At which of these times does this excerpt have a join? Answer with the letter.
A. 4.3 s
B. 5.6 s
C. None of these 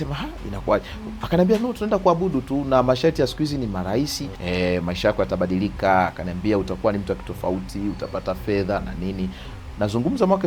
A